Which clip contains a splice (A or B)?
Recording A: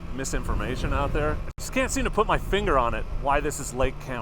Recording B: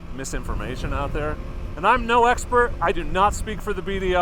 A